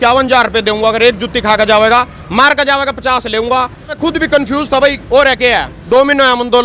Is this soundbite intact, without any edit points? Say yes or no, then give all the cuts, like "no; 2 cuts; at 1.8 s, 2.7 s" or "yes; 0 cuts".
no; 2 cuts; at 4.0 s, 5.7 s